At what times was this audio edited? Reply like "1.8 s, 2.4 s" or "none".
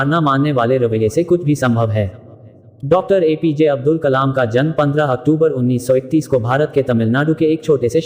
2.7 s